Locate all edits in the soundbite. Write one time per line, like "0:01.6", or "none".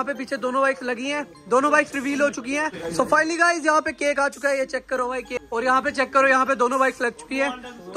0:02.8
0:05.3